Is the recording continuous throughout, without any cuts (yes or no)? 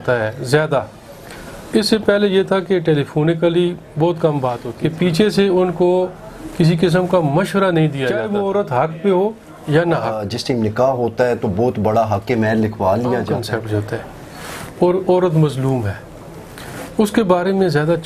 no